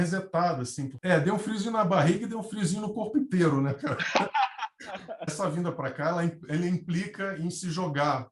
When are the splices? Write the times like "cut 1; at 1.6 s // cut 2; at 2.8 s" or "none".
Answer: cut 1; at 0.9 s // cut 2; at 5.1 s